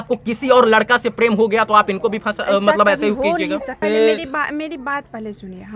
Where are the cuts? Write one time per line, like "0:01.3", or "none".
0:03.7

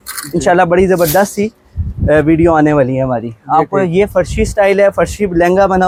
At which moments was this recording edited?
none

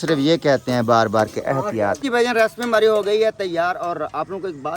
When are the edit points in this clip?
0:02.0

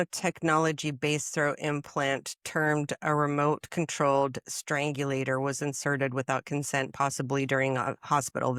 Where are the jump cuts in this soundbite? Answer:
none

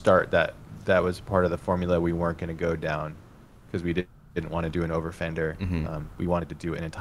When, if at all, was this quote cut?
none

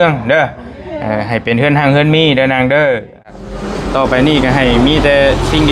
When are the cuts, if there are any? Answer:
0:03.4

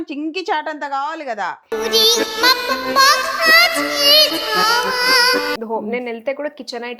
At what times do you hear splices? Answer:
0:05.6

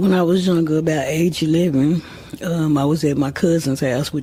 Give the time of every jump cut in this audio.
none

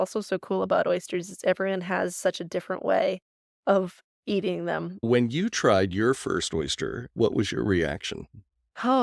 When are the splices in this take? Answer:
0:05.1

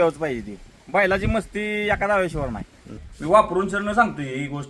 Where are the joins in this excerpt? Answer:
0:03.0

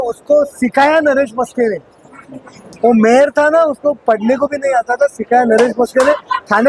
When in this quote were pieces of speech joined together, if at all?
none

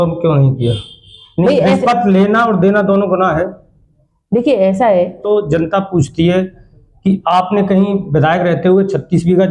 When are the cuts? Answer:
0:05.2

